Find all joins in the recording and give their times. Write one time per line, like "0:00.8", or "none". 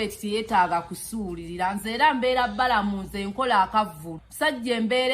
0:04.2